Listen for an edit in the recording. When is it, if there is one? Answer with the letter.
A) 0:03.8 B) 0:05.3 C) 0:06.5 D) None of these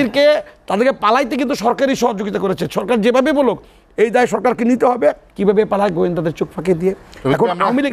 B